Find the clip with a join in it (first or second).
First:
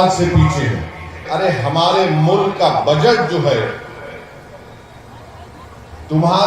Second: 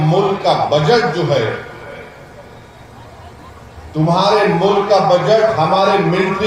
first